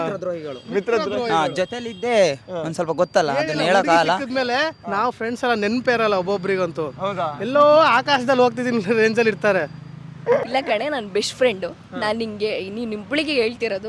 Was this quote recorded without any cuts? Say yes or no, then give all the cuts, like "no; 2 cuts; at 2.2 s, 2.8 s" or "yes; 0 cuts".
no; 1 cut; at 10.5 s